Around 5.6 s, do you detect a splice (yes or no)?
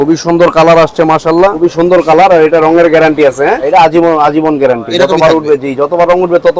no